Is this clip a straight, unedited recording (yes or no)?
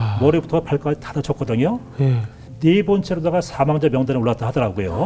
no